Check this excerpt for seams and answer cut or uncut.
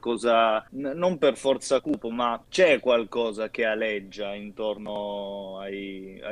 uncut